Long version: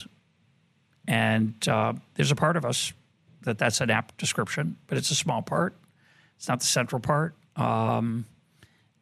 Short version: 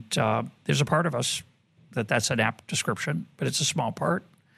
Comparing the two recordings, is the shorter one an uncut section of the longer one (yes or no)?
yes